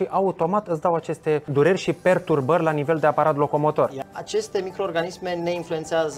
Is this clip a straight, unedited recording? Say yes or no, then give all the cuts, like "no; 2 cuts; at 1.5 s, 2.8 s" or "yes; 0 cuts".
no; 2 cuts; at 1.5 s, 4.0 s